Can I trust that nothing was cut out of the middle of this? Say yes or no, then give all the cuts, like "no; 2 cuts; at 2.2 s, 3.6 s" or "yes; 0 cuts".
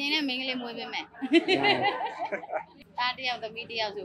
no; 1 cut; at 2.9 s